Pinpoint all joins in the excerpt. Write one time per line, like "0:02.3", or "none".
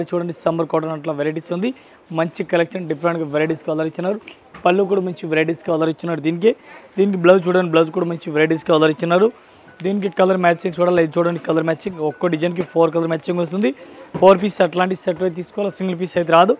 none